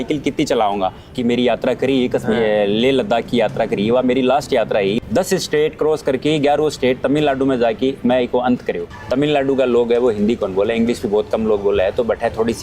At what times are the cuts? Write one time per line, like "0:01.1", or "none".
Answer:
0:01.0
0:05.0
0:08.9